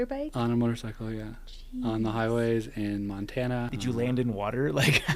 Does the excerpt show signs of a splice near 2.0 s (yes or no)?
no